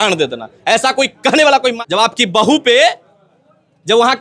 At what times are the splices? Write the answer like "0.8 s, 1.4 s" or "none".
1.8 s